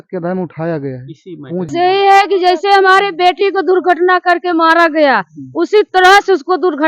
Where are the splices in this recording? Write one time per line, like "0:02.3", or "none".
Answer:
0:01.7